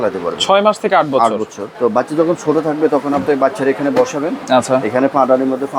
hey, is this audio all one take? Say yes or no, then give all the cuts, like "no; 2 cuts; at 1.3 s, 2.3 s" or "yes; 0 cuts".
no; 1 cut; at 1.6 s